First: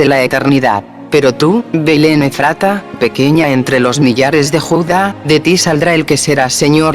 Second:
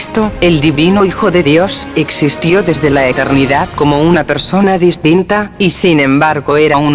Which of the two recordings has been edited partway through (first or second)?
first